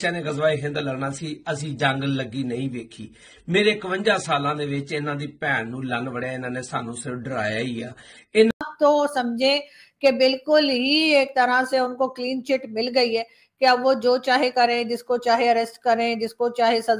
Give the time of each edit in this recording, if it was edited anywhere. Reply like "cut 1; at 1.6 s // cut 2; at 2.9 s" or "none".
cut 1; at 8.5 s

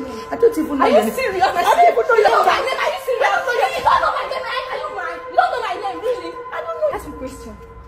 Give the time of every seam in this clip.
cut 1; at 2.3 s // cut 2; at 6.9 s

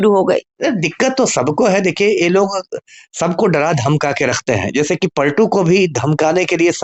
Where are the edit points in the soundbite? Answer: none

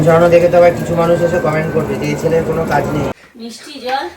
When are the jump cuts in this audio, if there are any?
cut 1; at 3.1 s

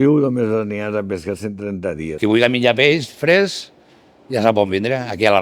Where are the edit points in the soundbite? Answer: cut 1; at 2.1 s

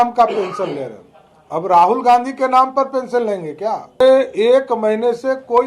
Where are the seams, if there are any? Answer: cut 1; at 4.0 s

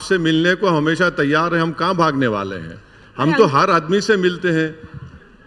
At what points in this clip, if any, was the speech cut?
none

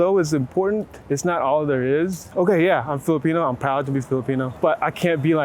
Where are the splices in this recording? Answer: cut 1; at 0.9 s // cut 2; at 2.3 s // cut 3; at 4.5 s

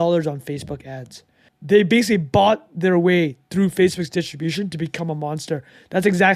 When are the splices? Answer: cut 1; at 1.5 s

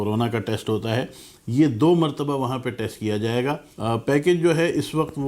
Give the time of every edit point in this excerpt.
cut 1; at 3.7 s

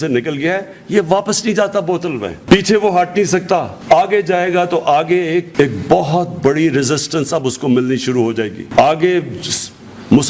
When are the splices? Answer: none

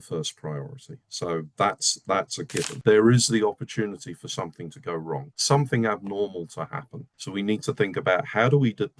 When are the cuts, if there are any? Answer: cut 1; at 2.7 s

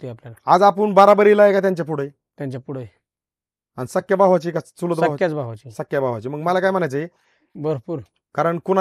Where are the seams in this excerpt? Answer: cut 1; at 7.4 s

